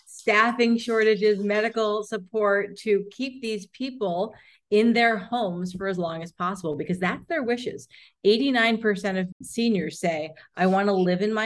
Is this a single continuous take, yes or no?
no